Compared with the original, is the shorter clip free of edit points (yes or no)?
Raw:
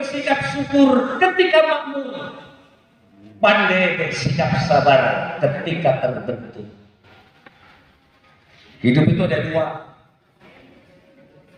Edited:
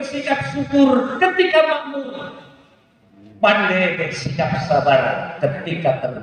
yes